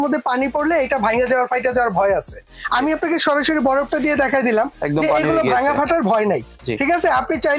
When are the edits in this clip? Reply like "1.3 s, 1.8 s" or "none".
none

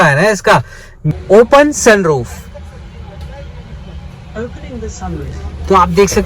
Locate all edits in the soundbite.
1.1 s

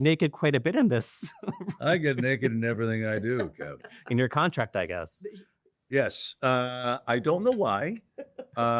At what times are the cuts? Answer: none

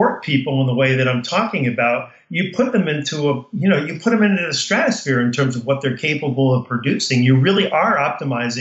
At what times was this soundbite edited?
none

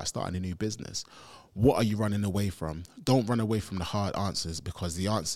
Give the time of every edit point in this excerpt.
none

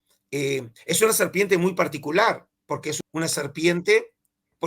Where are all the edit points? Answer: 2.9 s

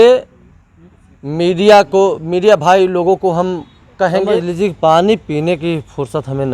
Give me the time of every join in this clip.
4.4 s

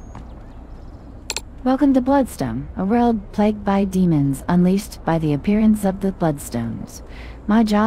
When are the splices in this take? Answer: 1.6 s

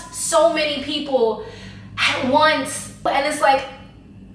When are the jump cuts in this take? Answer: 3.0 s

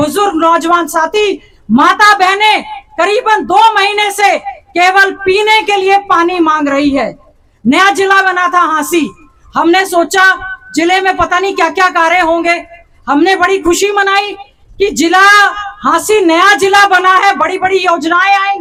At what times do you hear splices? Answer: none

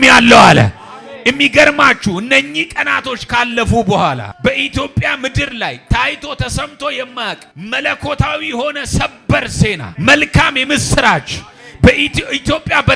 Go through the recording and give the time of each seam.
4.3 s, 7.5 s, 9.9 s

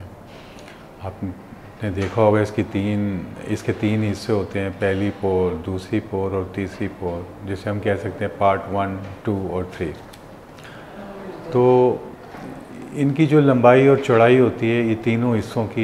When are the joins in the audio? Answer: none

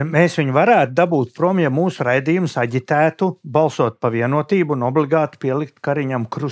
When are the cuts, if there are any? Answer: none

